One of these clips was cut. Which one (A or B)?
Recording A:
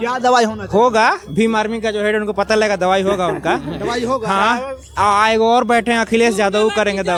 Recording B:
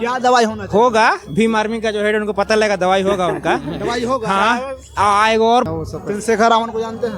B